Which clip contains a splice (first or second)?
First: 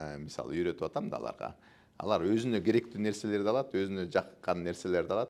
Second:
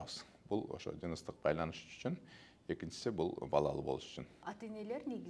second